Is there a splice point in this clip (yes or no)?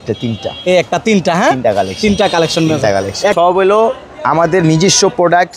yes